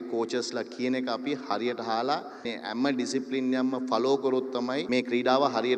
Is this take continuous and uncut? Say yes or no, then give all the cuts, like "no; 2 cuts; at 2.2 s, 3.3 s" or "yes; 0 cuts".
no; 2 cuts; at 2.5 s, 4.8 s